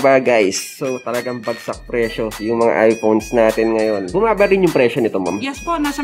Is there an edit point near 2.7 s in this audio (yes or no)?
no